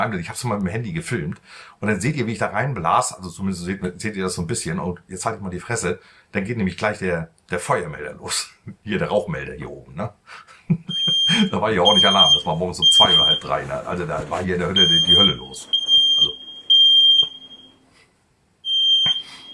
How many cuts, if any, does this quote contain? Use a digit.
0